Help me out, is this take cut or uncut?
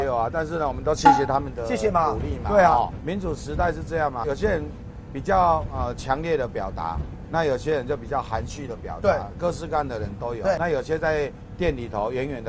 cut